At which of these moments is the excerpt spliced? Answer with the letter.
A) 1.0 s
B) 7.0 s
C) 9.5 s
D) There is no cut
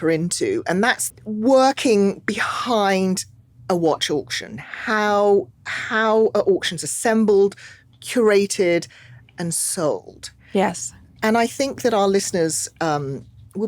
A